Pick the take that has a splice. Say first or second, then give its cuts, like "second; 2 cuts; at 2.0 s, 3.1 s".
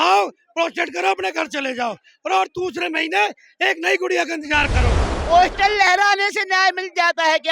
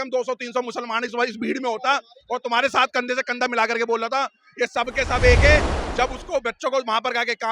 first; 1 cut; at 5.1 s